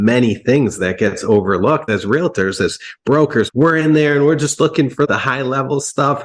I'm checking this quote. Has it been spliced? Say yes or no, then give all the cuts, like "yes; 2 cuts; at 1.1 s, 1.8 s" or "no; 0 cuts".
yes; 2 cuts; at 1.9 s, 5.1 s